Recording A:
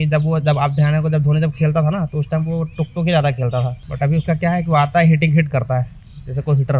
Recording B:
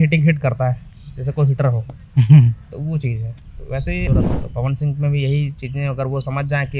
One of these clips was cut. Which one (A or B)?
B